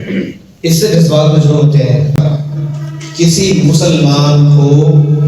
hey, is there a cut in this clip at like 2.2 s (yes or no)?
yes